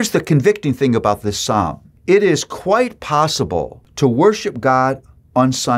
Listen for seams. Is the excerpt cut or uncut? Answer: cut